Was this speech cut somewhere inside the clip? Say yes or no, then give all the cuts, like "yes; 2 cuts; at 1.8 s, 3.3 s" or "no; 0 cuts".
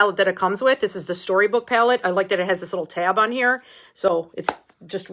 no; 0 cuts